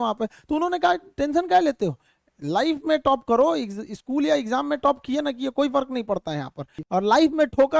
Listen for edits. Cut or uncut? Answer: cut